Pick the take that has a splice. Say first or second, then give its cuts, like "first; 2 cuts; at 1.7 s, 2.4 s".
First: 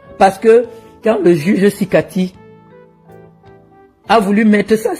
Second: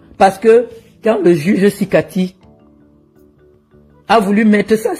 first; 2 cuts; at 2.3 s, 4.0 s